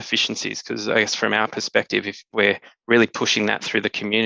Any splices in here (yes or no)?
yes